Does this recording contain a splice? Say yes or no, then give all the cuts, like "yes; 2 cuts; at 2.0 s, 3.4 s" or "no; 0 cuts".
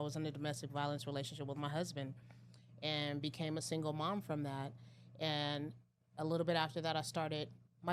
no; 0 cuts